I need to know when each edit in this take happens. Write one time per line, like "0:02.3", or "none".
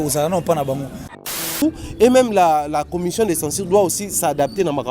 0:01.4